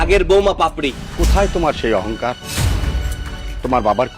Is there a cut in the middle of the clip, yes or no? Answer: yes